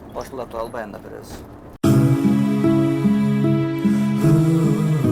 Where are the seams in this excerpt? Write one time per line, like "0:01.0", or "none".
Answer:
0:01.7